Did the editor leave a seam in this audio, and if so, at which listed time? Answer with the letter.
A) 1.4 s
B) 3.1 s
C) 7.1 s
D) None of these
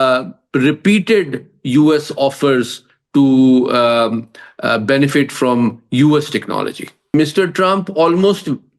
C